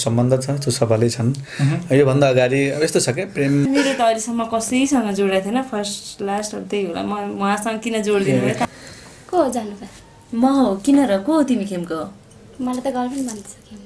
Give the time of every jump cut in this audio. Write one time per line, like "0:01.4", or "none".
0:03.6
0:08.6